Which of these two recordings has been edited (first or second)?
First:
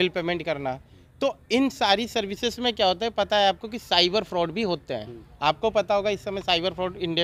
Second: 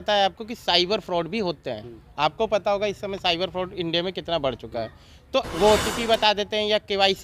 second